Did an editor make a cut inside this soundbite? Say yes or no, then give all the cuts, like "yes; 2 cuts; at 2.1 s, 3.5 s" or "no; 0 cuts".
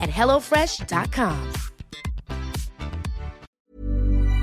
yes; 1 cut; at 3.5 s